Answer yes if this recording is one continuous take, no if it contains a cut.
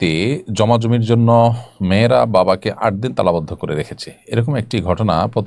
yes